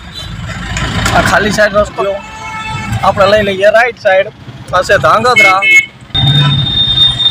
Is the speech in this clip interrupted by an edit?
yes; 1 cut; at 2.0 s

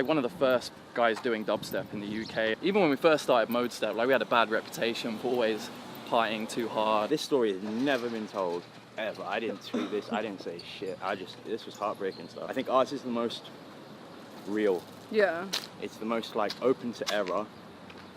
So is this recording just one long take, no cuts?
no; 3 cuts; at 2.6 s, 7.1 s, 12.4 s

